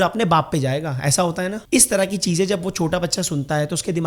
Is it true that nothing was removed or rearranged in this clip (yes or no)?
no